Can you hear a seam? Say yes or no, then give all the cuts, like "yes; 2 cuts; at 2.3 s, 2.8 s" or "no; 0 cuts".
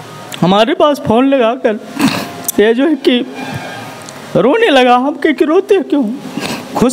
no; 0 cuts